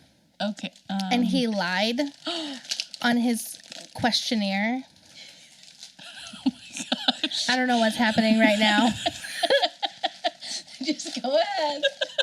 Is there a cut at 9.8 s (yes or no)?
no